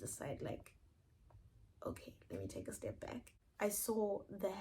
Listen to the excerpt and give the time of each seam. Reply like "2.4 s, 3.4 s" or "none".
3.4 s